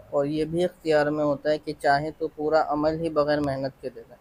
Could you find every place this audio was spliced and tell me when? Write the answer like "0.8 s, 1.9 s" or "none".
none